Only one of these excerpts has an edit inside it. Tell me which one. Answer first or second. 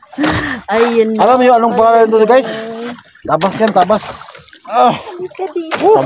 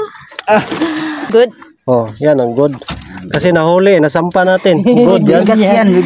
second